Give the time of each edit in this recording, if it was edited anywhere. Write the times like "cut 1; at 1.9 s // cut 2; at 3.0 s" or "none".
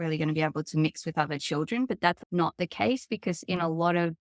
cut 1; at 2.2 s